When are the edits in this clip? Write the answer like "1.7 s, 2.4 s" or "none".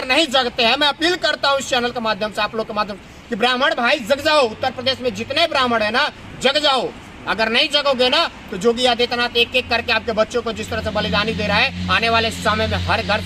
none